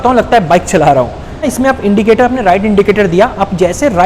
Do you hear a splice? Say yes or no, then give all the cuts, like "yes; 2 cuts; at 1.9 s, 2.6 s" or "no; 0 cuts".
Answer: yes; 1 cut; at 1.5 s